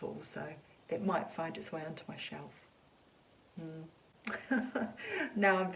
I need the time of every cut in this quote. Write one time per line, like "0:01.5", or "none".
none